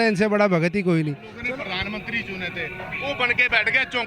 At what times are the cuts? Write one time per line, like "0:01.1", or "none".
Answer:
0:01.3